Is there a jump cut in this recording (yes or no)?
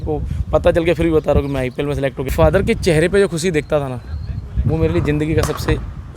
yes